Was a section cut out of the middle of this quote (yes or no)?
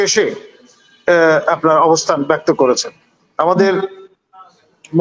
no